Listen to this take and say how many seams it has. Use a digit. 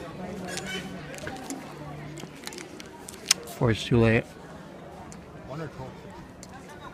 0